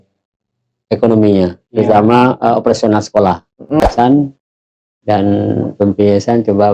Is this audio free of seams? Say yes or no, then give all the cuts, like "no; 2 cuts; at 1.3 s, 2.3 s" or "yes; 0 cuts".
no; 1 cut; at 3.8 s